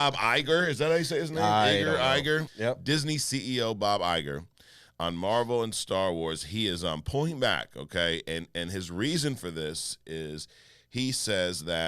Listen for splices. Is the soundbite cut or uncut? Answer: cut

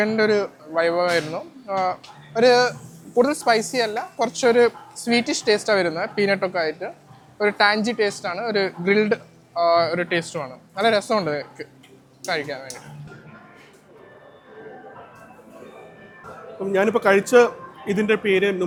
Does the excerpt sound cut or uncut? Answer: uncut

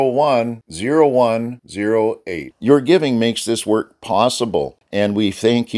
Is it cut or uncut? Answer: cut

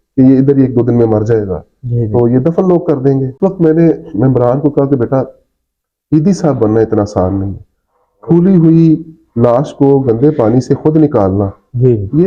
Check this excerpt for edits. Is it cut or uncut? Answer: cut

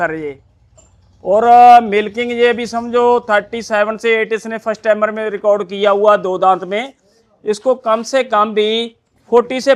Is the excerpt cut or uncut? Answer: uncut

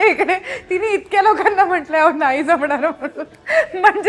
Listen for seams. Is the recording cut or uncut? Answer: uncut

